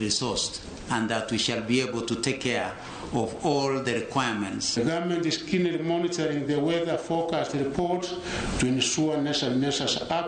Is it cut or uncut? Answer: cut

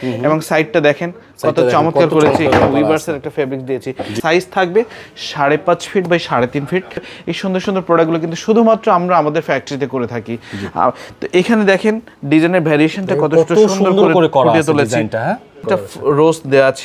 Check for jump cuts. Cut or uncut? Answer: cut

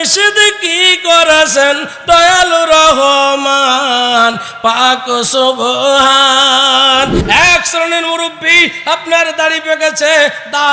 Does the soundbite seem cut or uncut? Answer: cut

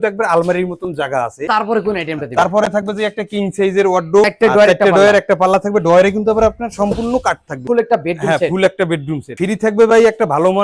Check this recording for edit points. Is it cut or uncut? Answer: cut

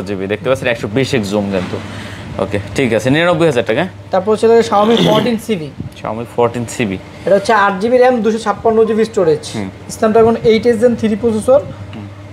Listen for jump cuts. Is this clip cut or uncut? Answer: uncut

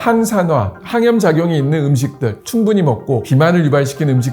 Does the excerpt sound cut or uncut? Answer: cut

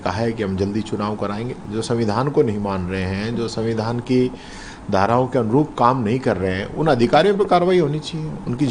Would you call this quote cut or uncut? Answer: cut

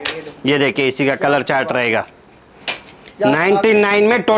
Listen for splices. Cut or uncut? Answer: uncut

